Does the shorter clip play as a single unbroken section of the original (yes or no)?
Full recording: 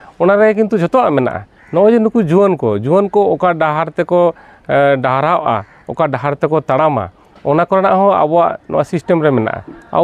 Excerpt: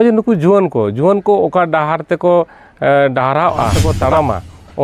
no